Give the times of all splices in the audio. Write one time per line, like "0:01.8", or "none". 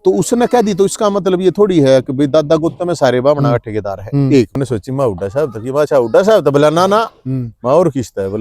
0:04.5